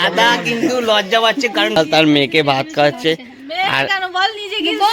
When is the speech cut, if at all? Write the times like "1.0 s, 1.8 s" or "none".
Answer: 1.8 s